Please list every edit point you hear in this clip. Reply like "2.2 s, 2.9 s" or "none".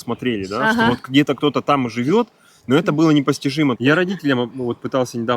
3.8 s